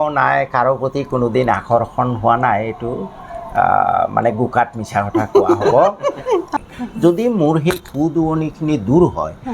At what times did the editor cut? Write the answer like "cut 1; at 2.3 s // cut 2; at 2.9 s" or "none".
cut 1; at 6.5 s

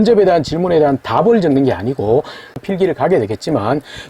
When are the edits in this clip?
cut 1; at 2.6 s

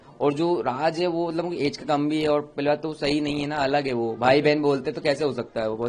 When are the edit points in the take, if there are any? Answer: none

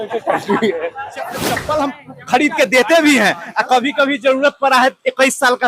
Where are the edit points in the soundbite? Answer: cut 1; at 1.5 s

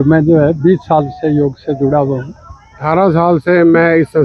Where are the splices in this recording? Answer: cut 1; at 2.8 s

